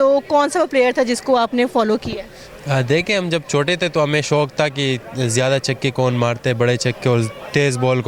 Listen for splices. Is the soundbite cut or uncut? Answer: uncut